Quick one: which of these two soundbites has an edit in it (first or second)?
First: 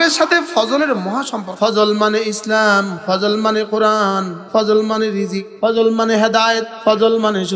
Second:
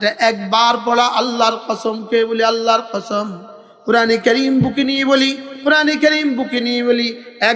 first